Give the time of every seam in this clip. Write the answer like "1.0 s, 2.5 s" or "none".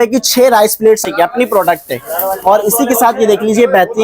1.0 s